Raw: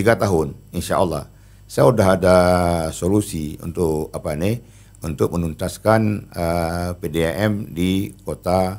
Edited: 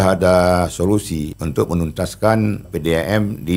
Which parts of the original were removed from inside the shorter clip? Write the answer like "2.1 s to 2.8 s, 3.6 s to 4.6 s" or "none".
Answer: 2.9 s to 4.5 s, 6.3 s to 6.9 s